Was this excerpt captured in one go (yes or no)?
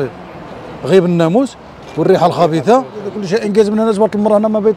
no